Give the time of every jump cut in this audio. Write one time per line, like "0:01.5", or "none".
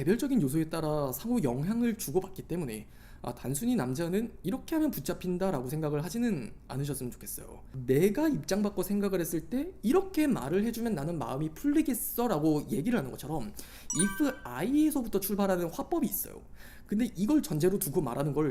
0:07.6